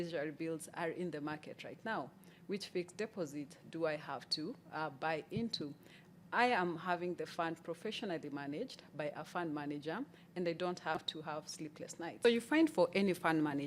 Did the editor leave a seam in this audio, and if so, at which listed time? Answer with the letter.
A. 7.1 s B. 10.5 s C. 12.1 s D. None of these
C